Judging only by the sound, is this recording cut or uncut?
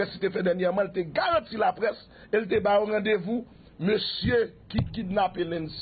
cut